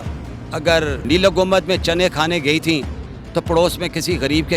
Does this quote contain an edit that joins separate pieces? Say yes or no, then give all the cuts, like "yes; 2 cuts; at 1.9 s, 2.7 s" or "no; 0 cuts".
yes; 1 cut; at 1.0 s